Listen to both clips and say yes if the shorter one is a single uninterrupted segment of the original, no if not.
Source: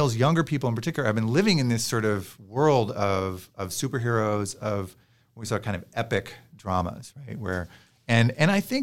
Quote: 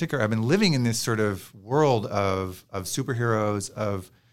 yes